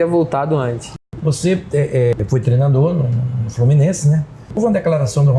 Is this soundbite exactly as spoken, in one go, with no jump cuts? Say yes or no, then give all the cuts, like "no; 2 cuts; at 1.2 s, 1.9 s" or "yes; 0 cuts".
no; 3 cuts; at 0.9 s, 2.1 s, 4.6 s